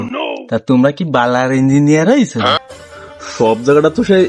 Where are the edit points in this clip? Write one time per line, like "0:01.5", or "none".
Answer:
0:02.6